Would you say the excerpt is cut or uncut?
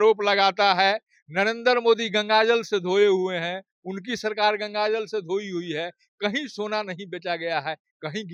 uncut